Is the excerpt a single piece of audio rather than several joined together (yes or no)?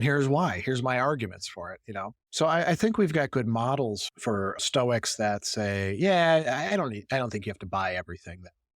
no